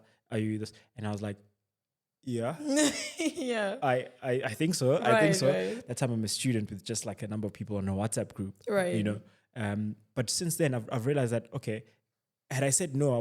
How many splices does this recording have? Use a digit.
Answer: 0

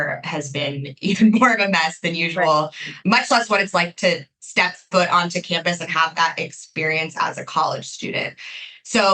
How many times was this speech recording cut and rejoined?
1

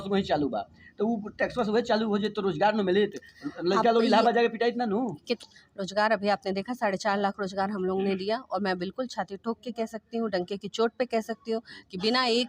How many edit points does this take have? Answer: 1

